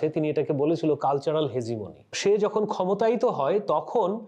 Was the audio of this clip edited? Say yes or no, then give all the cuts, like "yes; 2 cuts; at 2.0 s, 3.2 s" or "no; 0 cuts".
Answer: yes; 1 cut; at 2.1 s